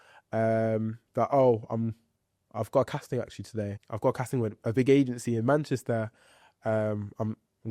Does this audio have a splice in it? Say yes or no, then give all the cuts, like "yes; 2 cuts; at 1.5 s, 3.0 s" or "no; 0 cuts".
yes; 1 cut; at 3.7 s